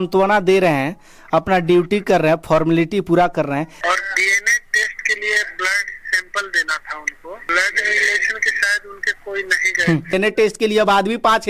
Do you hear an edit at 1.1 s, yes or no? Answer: no